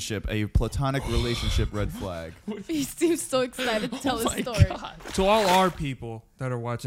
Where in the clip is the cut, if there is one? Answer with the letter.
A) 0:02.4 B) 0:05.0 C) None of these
B